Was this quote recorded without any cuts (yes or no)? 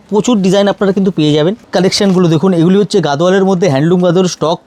no